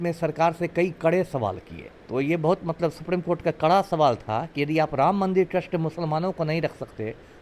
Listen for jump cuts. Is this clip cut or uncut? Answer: cut